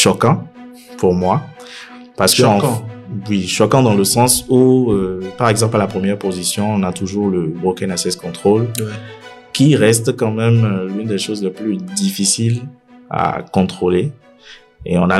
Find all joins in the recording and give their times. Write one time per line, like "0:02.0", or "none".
none